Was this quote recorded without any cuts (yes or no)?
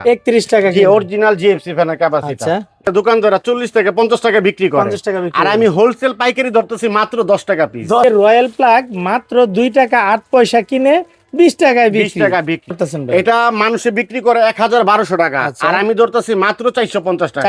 no